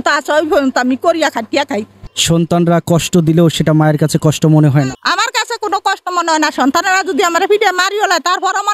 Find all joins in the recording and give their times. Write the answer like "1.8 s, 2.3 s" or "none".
5.0 s